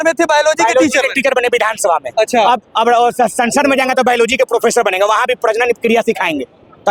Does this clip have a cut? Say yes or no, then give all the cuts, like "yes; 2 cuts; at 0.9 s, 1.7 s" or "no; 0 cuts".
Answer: no; 0 cuts